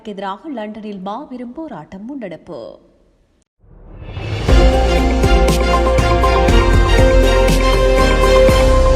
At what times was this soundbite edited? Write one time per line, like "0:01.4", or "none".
0:03.1

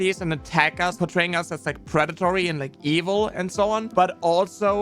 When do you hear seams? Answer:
0:00.9
0:03.9

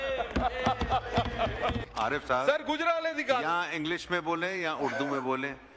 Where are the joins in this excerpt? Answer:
0:01.8

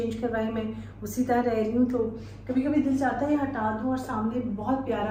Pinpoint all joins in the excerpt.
none

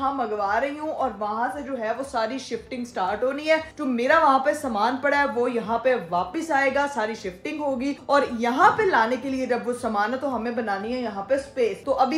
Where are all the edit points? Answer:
none

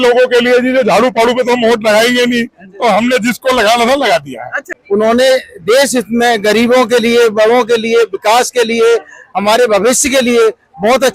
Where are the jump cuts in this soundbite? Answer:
0:04.7

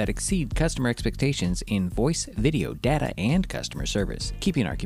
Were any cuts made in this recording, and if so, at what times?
none

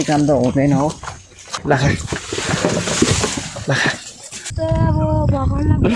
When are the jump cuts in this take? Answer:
0:01.6
0:04.5

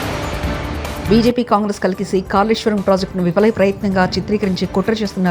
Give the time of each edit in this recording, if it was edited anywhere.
0:01.0

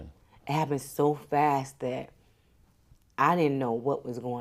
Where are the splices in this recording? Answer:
none

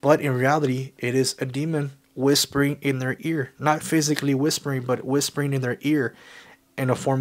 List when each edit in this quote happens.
none

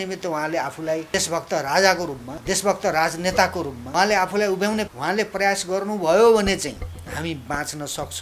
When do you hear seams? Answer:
0:01.1
0:02.3
0:03.8
0:04.9
0:06.9

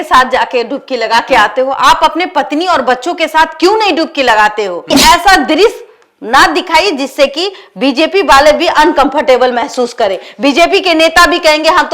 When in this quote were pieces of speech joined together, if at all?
0:05.0

